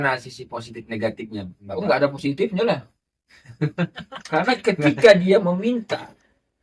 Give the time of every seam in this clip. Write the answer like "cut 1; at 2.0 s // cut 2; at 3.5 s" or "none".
cut 1; at 1.6 s